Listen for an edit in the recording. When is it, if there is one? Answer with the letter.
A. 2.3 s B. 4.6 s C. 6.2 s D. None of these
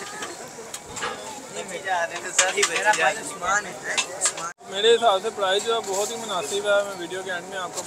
B